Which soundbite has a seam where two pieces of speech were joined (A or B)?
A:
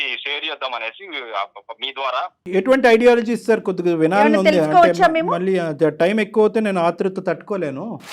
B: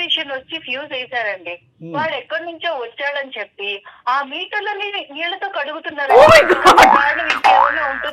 A